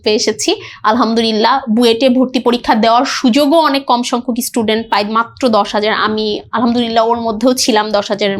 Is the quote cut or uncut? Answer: uncut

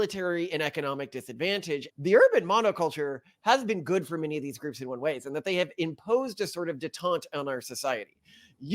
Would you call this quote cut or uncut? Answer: cut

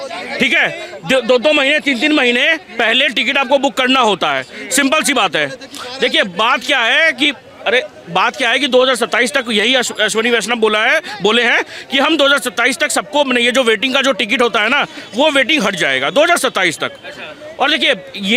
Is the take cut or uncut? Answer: uncut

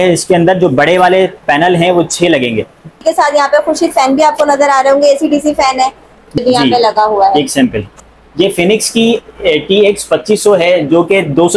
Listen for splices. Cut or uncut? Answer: cut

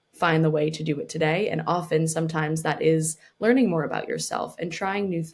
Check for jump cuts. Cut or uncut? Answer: uncut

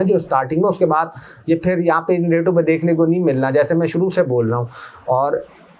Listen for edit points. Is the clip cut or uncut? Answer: uncut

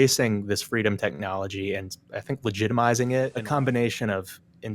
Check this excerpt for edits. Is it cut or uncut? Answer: cut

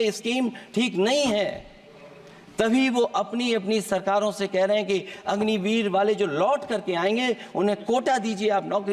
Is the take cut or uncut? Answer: uncut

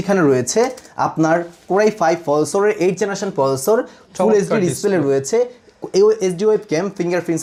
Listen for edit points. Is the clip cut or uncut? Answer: uncut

